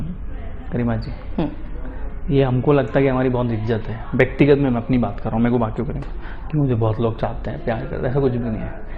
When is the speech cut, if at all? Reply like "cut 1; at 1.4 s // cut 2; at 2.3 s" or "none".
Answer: none